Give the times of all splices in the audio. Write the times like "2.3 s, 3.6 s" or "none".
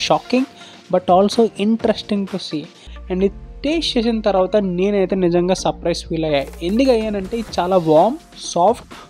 2.9 s